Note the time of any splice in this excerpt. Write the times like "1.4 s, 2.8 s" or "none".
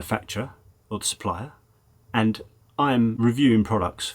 3.2 s